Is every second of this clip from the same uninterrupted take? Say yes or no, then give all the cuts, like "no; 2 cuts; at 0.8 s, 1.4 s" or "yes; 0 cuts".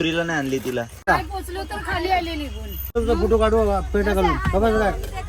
no; 2 cuts; at 1.1 s, 3.0 s